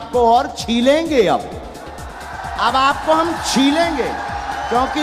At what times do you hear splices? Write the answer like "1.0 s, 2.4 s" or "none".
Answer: none